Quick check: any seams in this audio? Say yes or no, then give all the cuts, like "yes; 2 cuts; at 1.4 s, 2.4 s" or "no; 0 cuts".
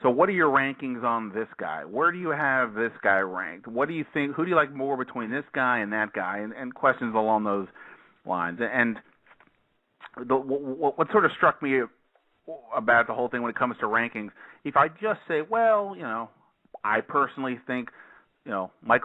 no; 0 cuts